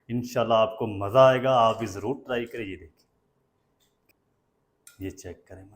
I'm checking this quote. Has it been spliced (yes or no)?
yes